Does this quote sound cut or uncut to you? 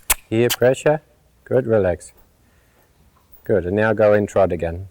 uncut